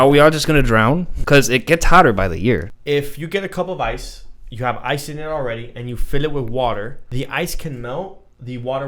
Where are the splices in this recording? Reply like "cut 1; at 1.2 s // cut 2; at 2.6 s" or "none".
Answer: cut 1; at 1.1 s // cut 2; at 2.7 s // cut 3; at 7.0 s